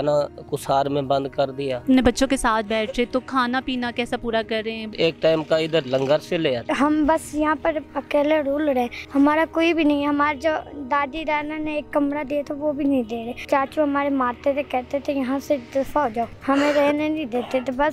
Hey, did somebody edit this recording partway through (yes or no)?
yes